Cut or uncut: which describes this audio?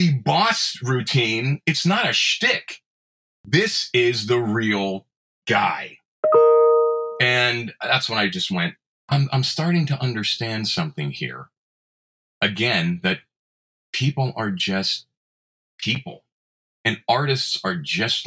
cut